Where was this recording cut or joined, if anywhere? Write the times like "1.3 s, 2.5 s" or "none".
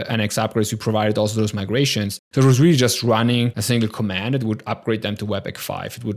2.2 s, 3.6 s